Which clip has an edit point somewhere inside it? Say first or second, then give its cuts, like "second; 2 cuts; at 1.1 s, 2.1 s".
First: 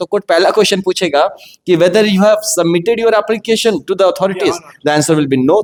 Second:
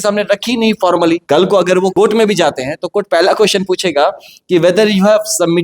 second; 2 cuts; at 1.2 s, 1.9 s